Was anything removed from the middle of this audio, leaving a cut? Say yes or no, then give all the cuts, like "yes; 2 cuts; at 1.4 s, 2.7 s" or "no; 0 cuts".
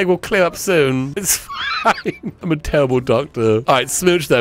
no; 0 cuts